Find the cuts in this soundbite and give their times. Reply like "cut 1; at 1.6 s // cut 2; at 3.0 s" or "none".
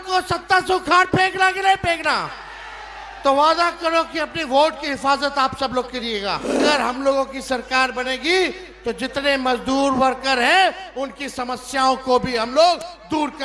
cut 1; at 6.6 s